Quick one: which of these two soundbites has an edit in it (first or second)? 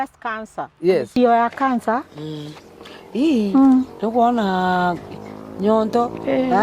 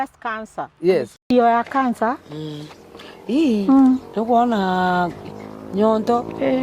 first